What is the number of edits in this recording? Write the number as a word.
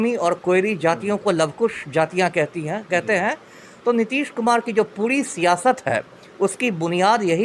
zero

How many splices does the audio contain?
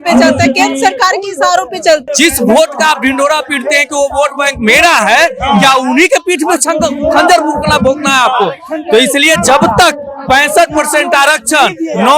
one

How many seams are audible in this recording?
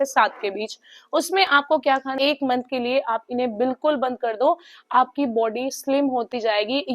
one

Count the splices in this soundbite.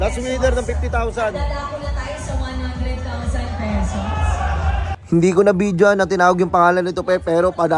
zero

